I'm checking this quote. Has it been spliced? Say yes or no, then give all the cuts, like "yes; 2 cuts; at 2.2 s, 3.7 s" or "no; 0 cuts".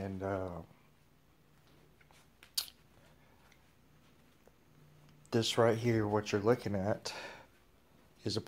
no; 0 cuts